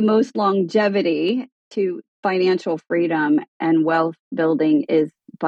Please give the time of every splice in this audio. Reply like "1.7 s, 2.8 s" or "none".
1.8 s, 3.5 s